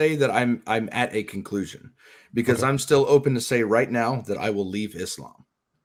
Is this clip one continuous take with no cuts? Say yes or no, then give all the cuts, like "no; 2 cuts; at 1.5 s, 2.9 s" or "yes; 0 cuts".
yes; 0 cuts